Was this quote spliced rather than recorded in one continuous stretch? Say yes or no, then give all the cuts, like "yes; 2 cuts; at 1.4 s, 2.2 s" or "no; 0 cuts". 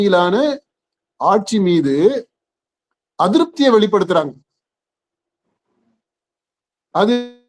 no; 0 cuts